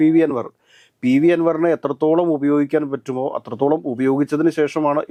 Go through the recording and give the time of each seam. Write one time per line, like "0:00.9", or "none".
none